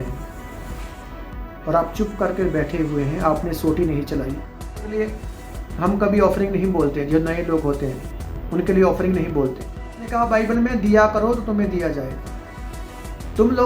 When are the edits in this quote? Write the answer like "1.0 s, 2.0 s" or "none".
5.0 s, 10.1 s